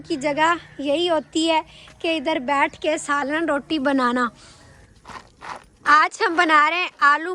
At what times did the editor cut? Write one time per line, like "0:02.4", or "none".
0:04.7